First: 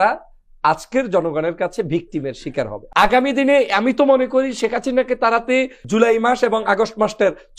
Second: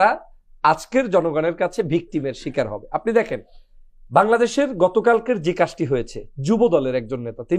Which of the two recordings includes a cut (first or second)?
first